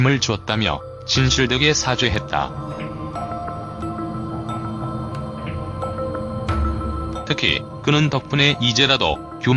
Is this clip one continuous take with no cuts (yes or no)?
no